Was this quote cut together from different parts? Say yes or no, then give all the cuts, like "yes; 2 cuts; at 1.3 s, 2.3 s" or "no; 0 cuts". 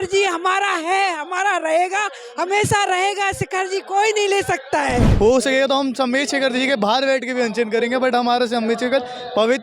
yes; 1 cut; at 5.1 s